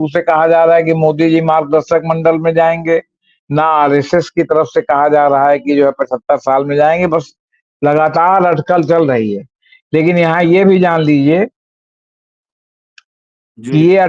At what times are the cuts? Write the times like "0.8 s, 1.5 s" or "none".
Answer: none